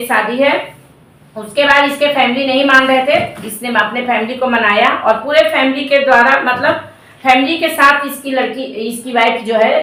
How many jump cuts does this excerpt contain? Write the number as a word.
zero